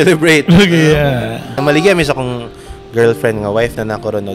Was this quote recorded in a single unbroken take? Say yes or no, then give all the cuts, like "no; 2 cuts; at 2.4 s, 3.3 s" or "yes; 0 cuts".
no; 1 cut; at 1.5 s